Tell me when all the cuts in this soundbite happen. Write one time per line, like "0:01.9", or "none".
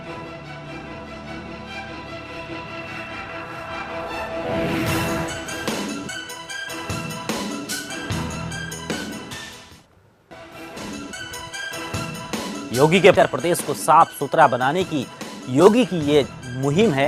none